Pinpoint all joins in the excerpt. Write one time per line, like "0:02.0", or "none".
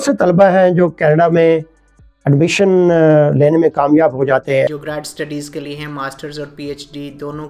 0:04.7

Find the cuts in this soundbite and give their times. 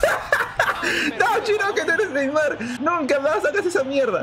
0:02.7

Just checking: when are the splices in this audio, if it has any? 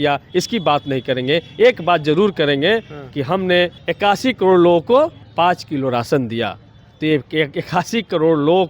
0:03.8
0:05.2

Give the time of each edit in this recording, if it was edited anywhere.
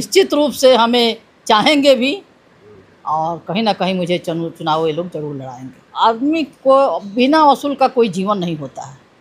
0:05.9

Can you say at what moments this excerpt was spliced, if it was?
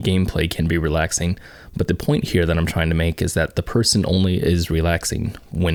none

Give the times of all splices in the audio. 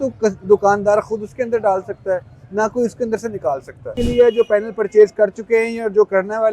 0:03.9

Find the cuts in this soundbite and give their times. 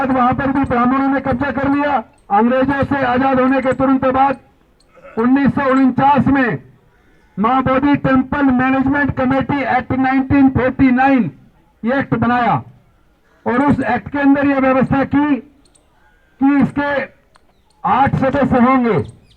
0:02.2

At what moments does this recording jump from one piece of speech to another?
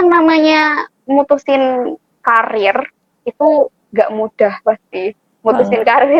none

